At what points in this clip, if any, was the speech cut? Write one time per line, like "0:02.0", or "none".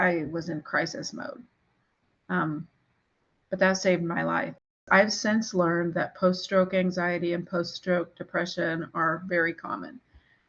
0:04.7